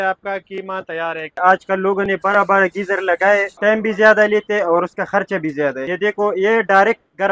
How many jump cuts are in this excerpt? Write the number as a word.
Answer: three